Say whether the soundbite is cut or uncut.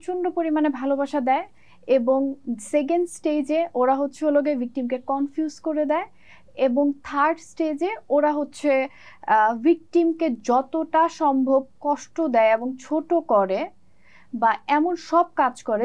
uncut